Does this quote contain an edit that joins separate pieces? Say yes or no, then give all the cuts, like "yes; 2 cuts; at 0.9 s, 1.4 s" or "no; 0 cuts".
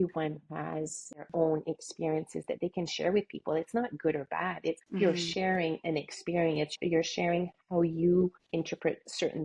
yes; 4 cuts; at 1.2 s, 4.8 s, 6.8 s, 8.4 s